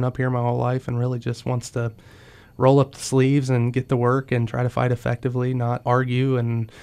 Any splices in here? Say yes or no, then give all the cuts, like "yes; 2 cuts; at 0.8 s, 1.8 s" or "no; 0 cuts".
yes; 1 cut; at 5.8 s